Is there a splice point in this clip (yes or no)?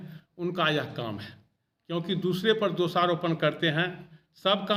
no